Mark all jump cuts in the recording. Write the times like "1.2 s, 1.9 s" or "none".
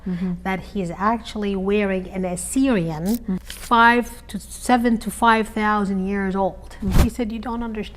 3.4 s, 7.0 s